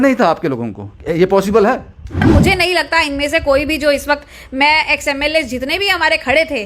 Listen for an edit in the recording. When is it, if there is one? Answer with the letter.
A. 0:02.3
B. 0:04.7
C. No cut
A